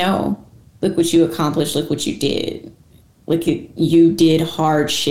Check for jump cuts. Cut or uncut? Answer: uncut